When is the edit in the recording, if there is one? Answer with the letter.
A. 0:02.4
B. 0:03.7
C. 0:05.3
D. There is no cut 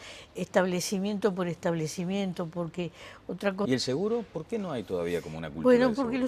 D